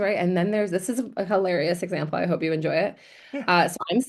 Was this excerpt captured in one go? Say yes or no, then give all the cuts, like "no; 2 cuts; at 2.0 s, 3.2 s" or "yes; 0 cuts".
yes; 0 cuts